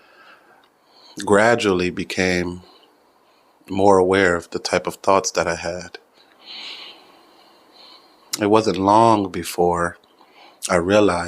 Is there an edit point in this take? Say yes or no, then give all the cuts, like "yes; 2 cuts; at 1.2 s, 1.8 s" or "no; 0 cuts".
yes; 1 cut; at 8.3 s